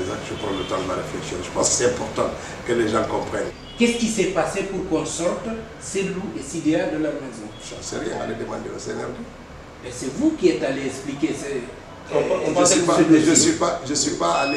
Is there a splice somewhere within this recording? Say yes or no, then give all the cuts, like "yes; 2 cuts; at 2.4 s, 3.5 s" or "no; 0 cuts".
yes; 1 cut; at 3.5 s